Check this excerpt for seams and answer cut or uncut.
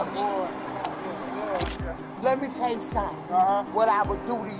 cut